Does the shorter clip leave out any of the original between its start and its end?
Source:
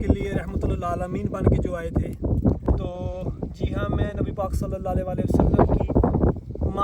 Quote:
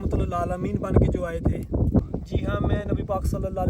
yes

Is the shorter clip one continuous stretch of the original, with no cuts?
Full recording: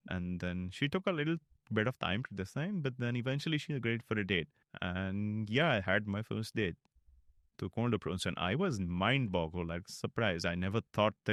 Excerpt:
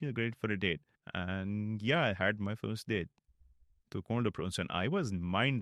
yes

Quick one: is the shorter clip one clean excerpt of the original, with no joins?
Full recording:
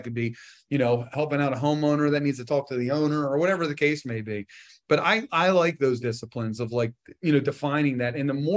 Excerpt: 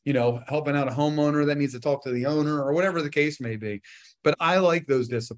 no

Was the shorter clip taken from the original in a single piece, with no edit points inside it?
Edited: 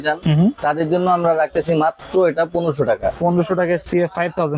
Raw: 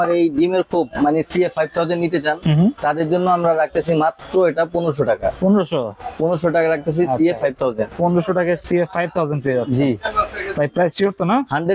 no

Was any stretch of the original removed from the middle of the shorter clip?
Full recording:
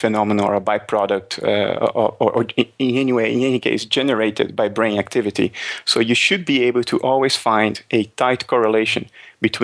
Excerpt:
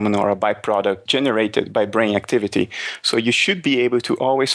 yes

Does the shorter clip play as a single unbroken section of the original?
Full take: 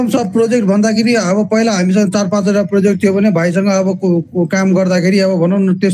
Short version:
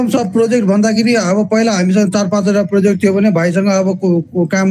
yes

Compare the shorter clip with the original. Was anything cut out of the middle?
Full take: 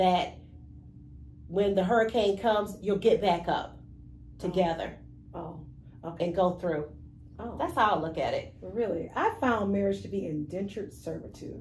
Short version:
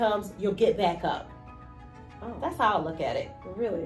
yes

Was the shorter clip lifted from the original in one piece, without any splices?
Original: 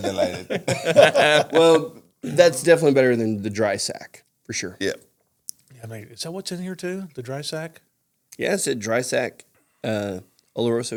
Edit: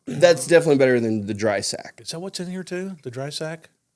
no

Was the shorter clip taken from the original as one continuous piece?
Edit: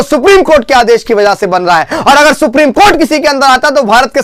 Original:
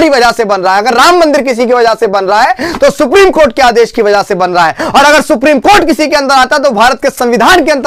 yes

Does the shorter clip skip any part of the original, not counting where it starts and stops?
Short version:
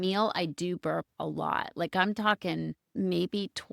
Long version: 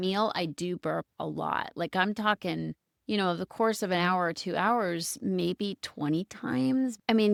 yes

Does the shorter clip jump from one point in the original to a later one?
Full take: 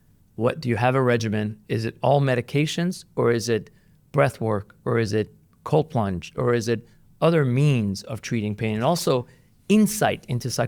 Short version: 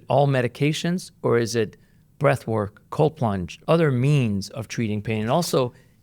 yes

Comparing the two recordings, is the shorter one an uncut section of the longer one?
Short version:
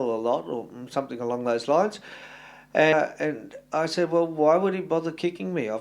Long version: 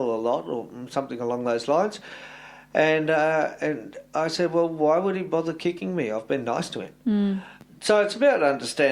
no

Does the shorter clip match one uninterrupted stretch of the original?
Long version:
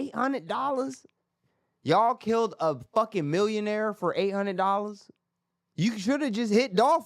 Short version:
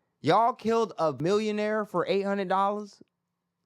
no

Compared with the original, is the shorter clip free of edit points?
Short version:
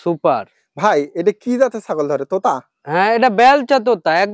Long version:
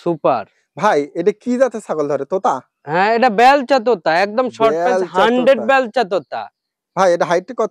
yes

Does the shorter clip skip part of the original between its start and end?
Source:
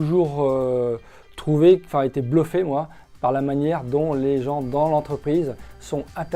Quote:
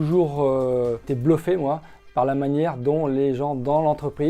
yes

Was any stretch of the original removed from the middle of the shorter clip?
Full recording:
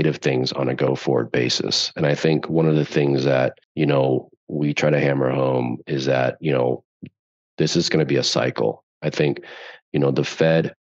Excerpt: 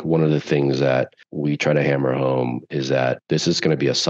yes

